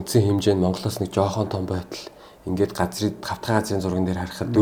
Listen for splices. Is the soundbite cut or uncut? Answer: uncut